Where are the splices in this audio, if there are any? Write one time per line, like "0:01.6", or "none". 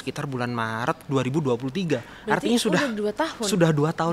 none